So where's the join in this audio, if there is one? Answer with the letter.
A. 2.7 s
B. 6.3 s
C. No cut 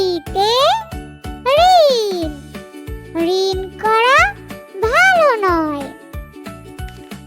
B